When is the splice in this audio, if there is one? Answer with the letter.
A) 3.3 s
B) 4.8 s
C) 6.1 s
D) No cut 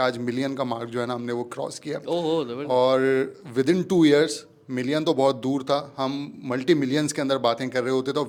D